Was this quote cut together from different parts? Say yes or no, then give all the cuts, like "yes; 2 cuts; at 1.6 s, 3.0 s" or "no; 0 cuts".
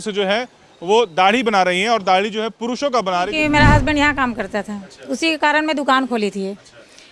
yes; 1 cut; at 3.3 s